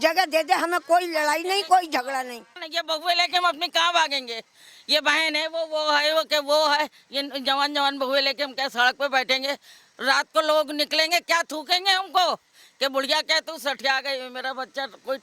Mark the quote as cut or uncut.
cut